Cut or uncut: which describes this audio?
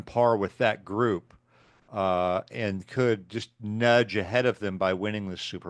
uncut